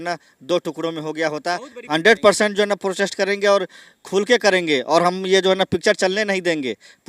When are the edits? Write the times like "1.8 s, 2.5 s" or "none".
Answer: 1.7 s